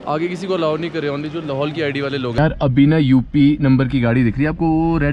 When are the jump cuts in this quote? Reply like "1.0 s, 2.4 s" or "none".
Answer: 2.4 s